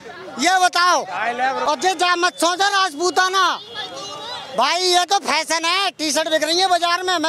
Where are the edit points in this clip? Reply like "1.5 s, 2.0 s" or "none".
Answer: 1.6 s